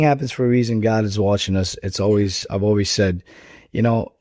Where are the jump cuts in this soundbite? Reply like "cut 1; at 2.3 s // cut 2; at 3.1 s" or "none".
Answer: none